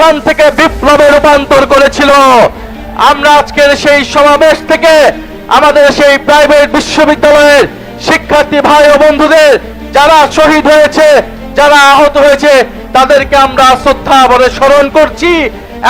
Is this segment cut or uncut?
uncut